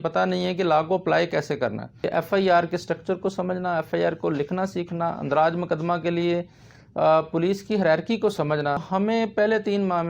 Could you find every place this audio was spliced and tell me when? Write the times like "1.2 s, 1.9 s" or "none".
1.9 s, 8.8 s